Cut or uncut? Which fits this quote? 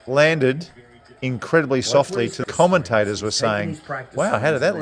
uncut